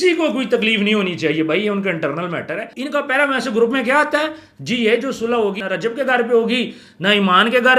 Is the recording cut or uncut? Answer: cut